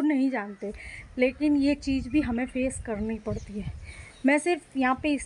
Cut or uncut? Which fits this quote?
uncut